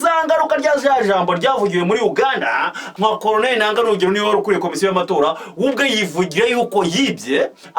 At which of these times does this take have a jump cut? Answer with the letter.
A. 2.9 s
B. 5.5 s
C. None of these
A